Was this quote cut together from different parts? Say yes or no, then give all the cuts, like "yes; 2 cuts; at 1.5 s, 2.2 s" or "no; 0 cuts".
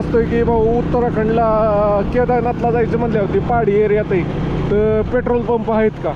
no; 0 cuts